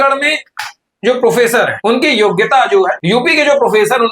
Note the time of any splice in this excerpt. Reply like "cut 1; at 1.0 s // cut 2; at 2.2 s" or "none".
cut 1; at 1.8 s // cut 2; at 3.0 s